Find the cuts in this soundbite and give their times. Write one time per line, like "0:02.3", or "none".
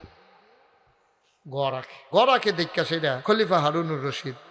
0:01.9
0:03.2